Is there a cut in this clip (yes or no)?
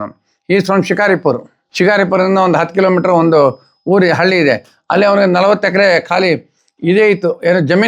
yes